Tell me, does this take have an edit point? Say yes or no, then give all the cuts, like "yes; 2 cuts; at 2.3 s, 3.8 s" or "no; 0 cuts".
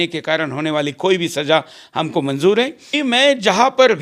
yes; 1 cut; at 2.8 s